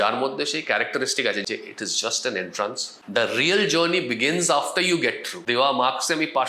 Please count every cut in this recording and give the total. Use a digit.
3